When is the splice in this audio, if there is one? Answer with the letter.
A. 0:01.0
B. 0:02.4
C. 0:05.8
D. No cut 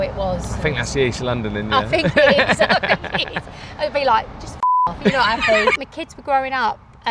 C